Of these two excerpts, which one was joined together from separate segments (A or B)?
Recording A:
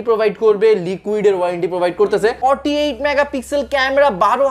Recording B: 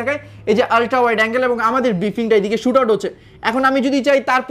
A